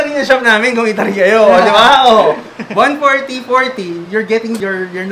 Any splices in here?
no; 0 cuts

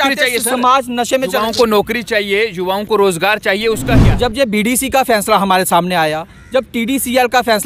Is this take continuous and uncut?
no; 1 cut; at 3.9 s

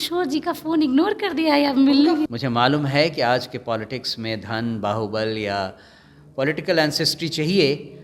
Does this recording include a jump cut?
yes; 1 cut; at 2.3 s

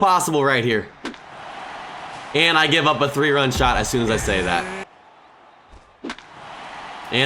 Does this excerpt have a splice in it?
yes; 1 cut; at 4.8 s

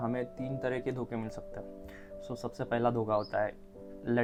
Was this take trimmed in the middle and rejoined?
no; 0 cuts

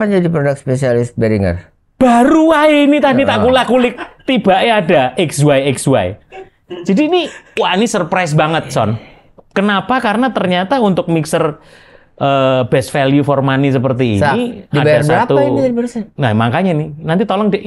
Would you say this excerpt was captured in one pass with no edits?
yes; 0 cuts

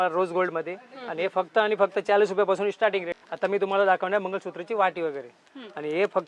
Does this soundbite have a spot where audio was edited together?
yes; 1 cut; at 3.1 s

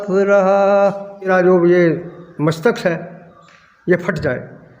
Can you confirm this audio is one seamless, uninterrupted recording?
no; 1 cut; at 1.3 s

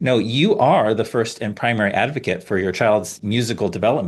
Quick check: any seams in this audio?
yes; 1 cut; at 3.1 s

